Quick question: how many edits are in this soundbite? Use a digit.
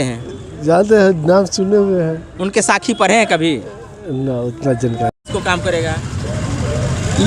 1